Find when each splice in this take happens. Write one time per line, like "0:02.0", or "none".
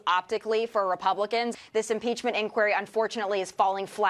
0:01.6